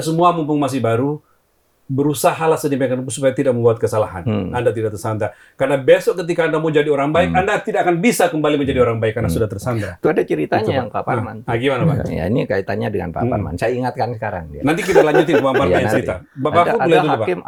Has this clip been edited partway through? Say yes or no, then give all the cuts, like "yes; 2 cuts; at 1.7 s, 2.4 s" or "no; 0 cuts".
no; 0 cuts